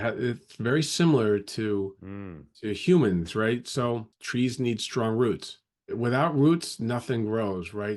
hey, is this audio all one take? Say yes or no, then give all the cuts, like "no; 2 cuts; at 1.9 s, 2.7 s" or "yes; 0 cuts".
no; 2 cuts; at 4.2 s, 5.9 s